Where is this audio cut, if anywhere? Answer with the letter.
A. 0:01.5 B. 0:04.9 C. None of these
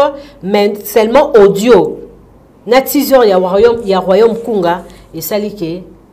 C